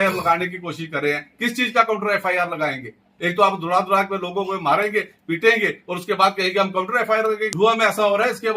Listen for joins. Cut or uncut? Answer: cut